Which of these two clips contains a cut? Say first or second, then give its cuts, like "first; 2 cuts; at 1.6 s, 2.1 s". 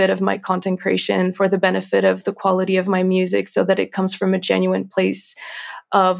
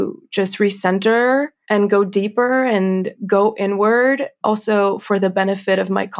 second; 3 cuts; at 1.6 s, 3.1 s, 4.4 s